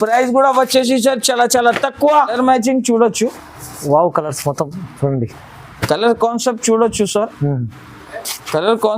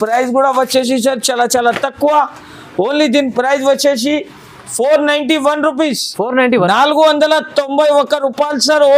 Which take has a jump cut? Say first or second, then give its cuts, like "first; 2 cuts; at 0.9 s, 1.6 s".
first; 1 cut; at 2.3 s